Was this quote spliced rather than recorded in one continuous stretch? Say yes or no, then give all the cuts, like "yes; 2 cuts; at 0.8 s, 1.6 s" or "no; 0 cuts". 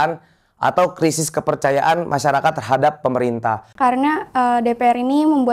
yes; 1 cut; at 3.7 s